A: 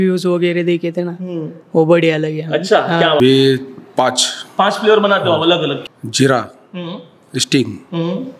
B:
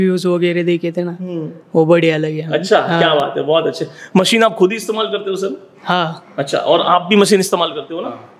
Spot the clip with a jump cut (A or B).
A